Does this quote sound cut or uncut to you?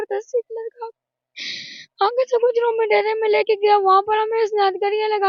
uncut